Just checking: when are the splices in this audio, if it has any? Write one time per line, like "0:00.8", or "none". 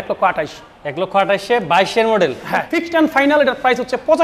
0:02.9